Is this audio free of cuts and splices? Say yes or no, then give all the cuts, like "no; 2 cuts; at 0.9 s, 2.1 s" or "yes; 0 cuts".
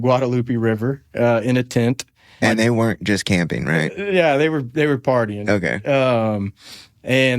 no; 1 cut; at 2.4 s